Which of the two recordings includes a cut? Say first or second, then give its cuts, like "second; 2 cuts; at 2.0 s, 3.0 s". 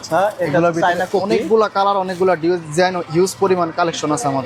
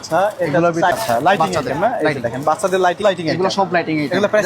second; 2 cuts; at 0.9 s, 3.0 s